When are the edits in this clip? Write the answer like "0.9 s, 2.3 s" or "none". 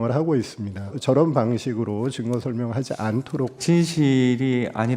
1.0 s, 3.6 s